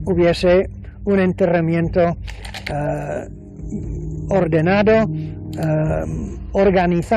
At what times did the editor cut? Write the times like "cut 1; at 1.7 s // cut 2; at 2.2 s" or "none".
cut 1; at 2.0 s

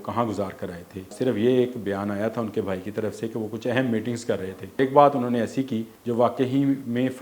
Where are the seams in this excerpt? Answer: cut 1; at 1.1 s // cut 2; at 4.8 s // cut 3; at 5.9 s

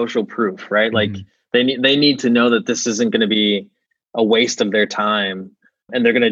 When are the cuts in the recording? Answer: none

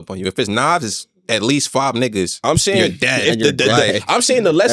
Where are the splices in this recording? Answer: none

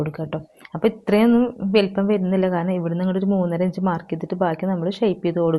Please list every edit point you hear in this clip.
none

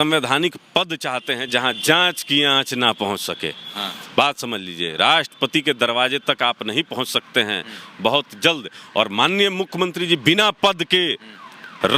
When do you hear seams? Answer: none

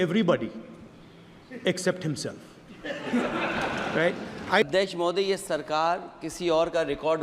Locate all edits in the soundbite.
cut 1; at 4.6 s

